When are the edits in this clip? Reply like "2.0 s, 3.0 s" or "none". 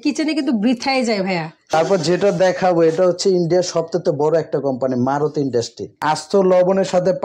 1.7 s, 5.9 s